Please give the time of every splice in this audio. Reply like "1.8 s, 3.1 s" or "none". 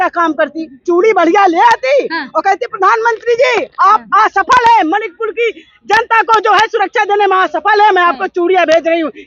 none